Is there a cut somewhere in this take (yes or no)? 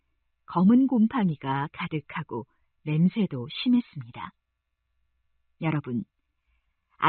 no